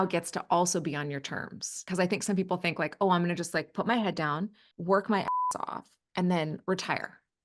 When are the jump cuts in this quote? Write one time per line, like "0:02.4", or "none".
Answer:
0:01.8
0:04.7